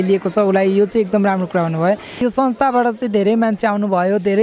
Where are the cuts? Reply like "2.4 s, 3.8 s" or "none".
2.2 s